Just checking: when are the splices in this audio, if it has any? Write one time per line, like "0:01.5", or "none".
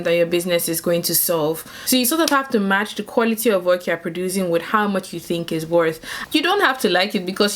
0:01.7
0:06.1